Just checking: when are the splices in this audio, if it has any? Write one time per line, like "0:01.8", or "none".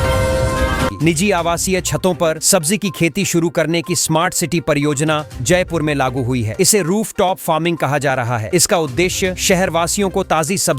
0:00.9